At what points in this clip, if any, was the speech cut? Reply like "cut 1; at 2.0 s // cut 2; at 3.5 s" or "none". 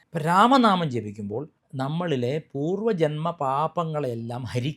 cut 1; at 1.6 s